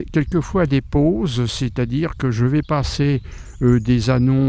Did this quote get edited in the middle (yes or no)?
no